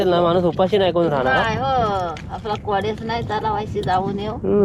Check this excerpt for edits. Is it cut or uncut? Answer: uncut